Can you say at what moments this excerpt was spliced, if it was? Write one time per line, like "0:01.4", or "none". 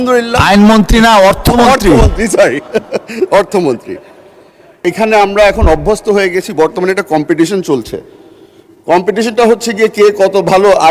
0:04.7